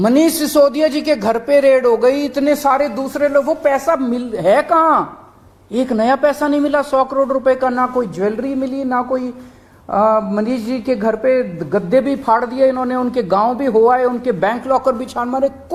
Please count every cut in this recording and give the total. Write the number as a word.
zero